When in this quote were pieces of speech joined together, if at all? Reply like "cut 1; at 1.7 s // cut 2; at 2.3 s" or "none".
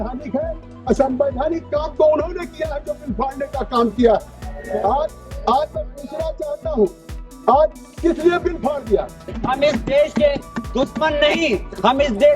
cut 1; at 9.3 s